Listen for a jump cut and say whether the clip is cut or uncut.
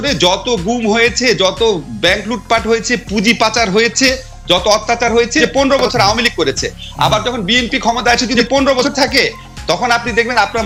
uncut